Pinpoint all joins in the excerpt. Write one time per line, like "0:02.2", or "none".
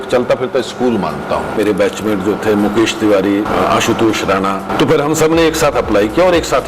0:01.6
0:03.5
0:04.7